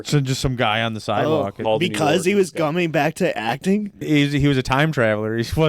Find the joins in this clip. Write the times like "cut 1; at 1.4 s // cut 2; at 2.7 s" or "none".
cut 1; at 1.6 s // cut 2; at 4.0 s